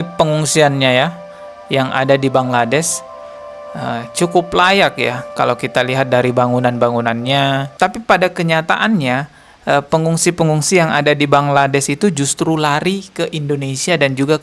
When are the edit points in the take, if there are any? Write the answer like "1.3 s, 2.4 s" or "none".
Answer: 7.7 s